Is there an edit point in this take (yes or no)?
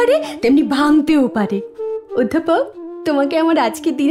yes